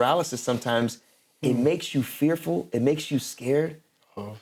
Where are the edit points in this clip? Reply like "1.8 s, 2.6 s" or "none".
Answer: none